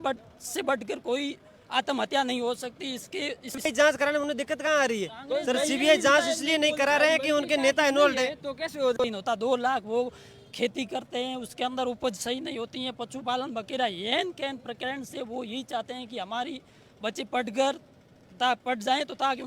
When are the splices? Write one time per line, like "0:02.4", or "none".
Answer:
0:03.6
0:08.9